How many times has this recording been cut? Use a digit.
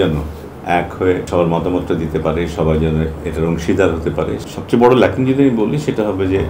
2